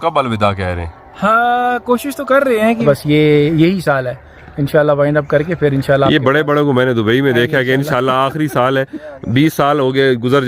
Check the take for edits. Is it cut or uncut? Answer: cut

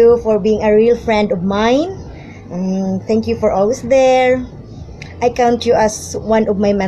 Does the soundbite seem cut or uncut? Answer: uncut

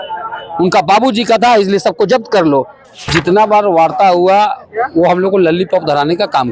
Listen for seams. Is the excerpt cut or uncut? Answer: cut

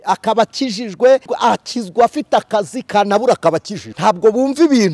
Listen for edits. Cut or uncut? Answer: cut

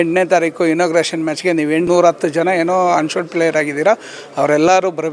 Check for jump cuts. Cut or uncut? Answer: uncut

